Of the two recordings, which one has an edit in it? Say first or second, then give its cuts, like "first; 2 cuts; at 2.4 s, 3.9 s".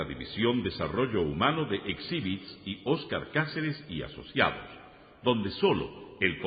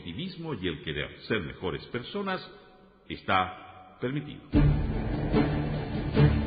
second; 1 cut; at 4.5 s